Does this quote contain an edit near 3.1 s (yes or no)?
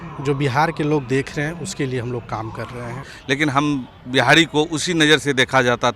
yes